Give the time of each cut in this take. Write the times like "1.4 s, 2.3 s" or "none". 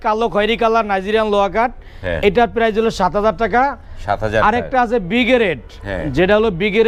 none

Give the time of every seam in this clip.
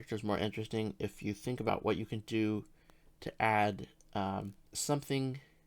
1.7 s

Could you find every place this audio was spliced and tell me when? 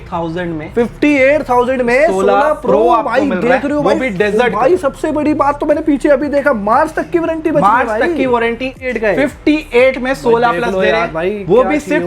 8.8 s

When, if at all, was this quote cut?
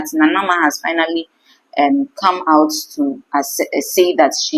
none

